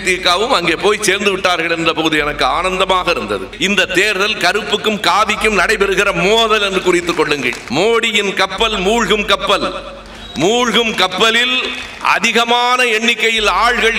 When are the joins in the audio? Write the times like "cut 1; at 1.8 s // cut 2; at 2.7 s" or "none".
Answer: cut 1; at 3.5 s // cut 2; at 7.6 s